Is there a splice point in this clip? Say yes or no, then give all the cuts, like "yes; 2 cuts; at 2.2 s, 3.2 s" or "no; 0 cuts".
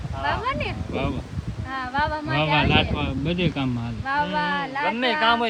no; 0 cuts